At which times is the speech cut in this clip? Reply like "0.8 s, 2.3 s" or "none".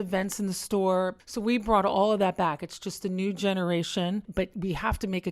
1.2 s, 4.3 s